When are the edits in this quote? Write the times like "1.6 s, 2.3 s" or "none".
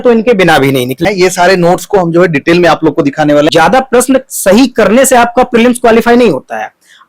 1.0 s, 3.5 s